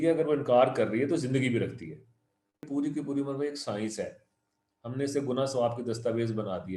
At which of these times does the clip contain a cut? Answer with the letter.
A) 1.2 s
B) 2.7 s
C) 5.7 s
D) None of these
B